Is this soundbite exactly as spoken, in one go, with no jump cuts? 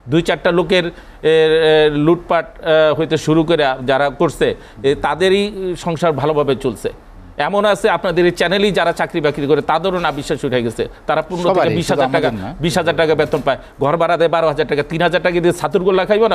yes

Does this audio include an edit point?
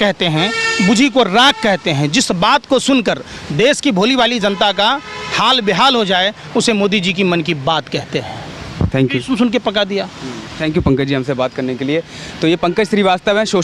no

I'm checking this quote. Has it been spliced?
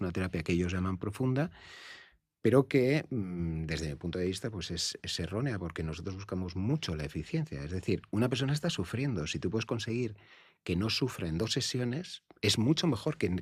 no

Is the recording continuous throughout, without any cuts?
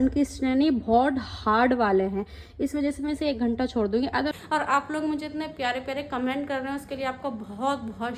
no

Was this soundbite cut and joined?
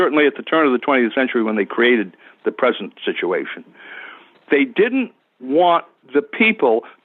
no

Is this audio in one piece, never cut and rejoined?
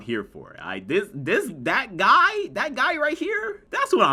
yes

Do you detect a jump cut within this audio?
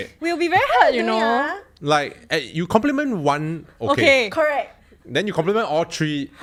no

